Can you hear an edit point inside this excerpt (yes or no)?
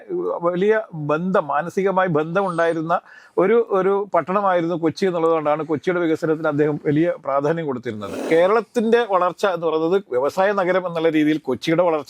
yes